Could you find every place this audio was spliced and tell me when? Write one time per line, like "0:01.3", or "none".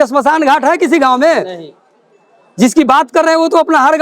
none